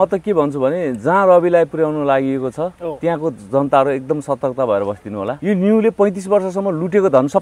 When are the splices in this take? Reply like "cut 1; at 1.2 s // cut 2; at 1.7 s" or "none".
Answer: cut 1; at 5.3 s